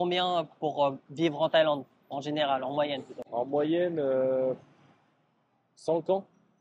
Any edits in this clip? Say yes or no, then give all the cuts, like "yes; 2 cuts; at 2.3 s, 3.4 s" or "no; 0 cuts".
no; 0 cuts